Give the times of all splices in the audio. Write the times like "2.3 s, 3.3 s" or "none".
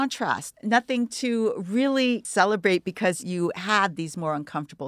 2.3 s